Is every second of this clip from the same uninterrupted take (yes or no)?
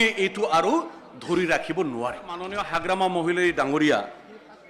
no